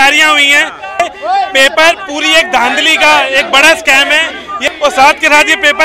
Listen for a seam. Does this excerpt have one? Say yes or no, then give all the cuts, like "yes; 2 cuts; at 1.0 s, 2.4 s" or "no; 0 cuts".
yes; 2 cuts; at 1.0 s, 4.5 s